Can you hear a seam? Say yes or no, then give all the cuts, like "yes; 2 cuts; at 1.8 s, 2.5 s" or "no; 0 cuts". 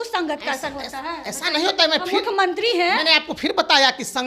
no; 0 cuts